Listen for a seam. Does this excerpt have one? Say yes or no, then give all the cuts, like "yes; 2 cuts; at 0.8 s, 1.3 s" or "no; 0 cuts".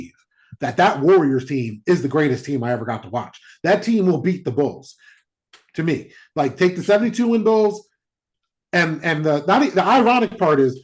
no; 0 cuts